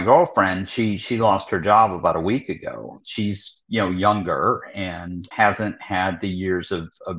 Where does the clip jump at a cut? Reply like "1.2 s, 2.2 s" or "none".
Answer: 3.0 s, 5.3 s